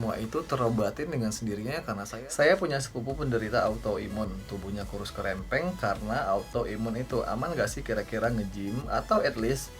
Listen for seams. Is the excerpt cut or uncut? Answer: cut